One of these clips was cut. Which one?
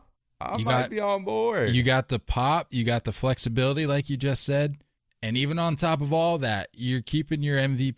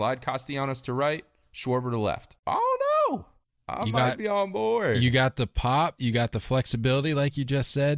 second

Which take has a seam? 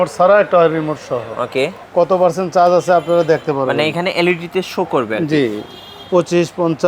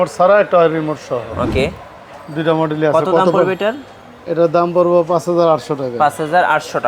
first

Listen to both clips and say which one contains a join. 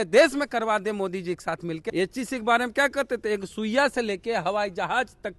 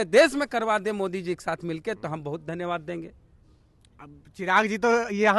first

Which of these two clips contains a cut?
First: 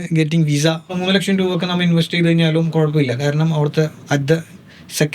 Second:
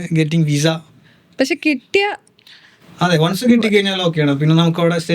first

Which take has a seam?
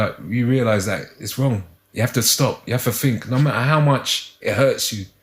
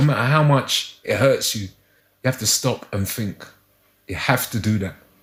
first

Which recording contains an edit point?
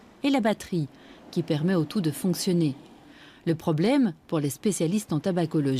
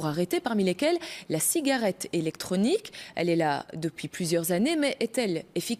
first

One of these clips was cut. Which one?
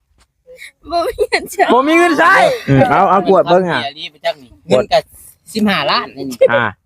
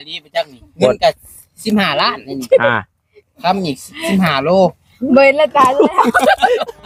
first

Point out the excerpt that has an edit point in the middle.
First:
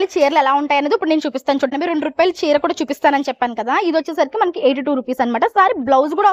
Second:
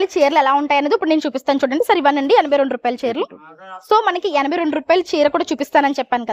first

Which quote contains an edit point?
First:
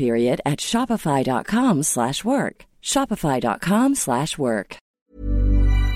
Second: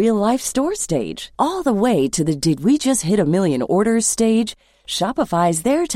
first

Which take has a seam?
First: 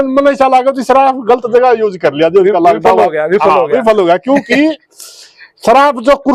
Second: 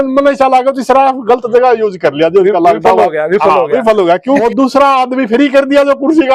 second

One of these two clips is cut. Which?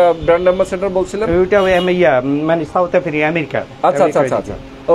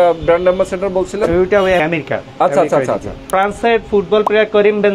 second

